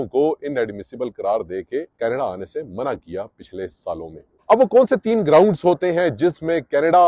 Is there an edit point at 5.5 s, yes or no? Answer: no